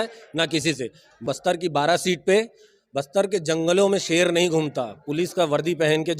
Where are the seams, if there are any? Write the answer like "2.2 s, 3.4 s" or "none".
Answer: 1.2 s